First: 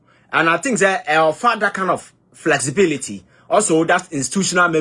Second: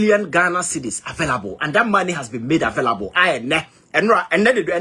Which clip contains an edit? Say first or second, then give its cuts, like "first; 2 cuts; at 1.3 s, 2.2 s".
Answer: second; 1 cut; at 2.2 s